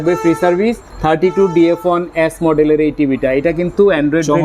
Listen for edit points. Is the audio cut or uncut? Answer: uncut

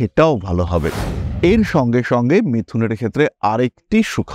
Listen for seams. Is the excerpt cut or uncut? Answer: cut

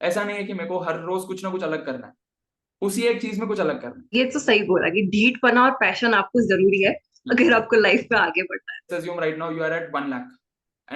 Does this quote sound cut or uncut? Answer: cut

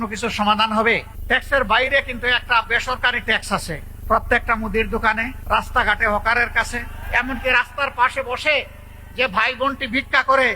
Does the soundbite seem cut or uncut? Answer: cut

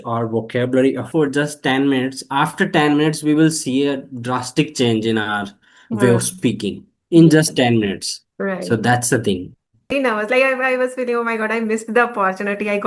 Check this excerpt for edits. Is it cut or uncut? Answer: cut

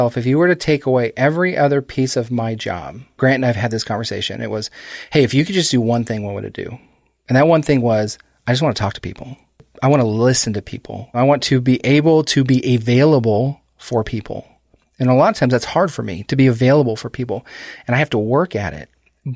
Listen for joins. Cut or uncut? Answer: cut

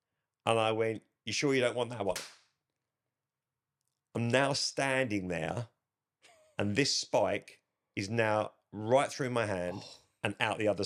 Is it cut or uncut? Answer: uncut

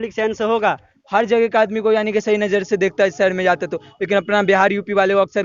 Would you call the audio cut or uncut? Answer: cut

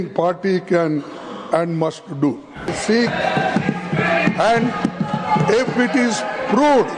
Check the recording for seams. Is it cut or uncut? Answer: cut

